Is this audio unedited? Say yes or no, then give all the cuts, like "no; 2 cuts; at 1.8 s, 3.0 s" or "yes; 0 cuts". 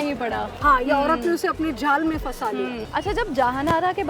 no; 1 cut; at 2.8 s